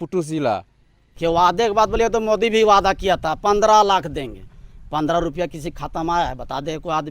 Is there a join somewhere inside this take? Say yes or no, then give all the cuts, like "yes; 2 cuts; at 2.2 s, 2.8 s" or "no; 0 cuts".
yes; 1 cut; at 1.2 s